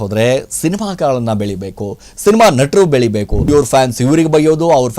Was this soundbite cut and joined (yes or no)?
yes